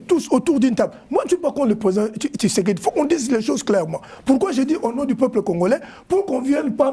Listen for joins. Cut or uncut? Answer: uncut